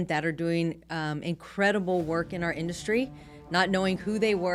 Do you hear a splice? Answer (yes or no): no